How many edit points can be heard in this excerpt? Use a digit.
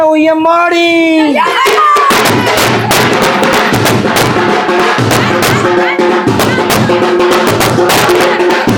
0